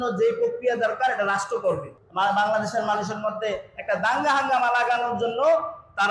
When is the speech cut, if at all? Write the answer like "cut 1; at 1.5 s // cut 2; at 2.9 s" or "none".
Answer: cut 1; at 1.9 s